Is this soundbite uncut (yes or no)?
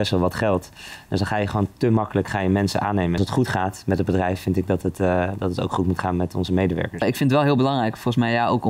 no